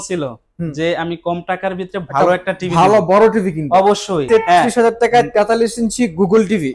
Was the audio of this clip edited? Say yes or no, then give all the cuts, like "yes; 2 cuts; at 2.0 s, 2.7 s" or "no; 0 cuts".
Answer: yes; 1 cut; at 4.3 s